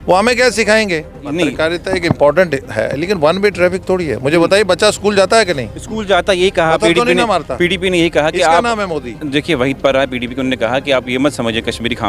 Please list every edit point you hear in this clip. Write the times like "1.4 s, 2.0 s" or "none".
1.2 s